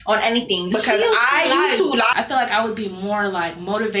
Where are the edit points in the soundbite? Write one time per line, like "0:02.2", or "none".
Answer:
0:02.1